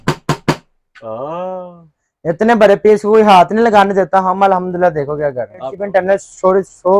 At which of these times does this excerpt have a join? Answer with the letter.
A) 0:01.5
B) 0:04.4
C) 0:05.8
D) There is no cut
C